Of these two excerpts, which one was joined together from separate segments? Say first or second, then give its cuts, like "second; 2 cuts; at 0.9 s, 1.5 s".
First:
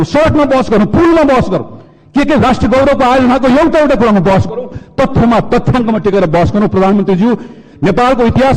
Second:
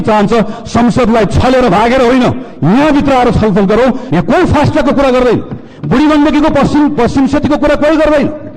second; 1 cut; at 4.0 s